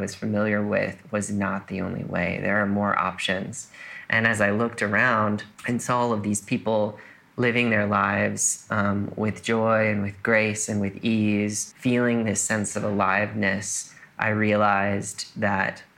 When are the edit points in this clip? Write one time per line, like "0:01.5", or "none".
0:05.5
0:11.7